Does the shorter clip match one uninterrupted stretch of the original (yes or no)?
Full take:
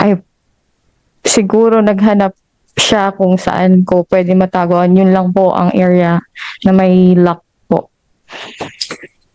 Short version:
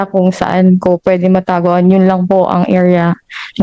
yes